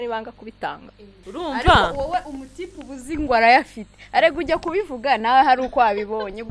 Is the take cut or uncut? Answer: cut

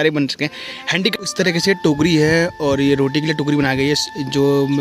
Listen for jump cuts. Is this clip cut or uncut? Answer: cut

